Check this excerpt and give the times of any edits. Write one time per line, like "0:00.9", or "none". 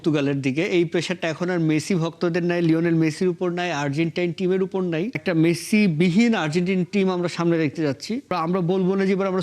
0:05.2
0:08.3